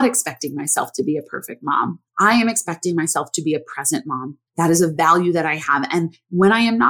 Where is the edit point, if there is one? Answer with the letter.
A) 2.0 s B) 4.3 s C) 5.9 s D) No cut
A